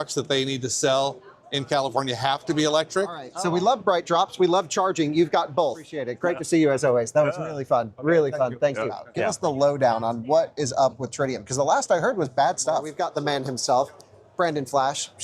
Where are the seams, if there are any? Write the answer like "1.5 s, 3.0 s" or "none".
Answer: 3.3 s, 6.0 s, 9.1 s, 12.9 s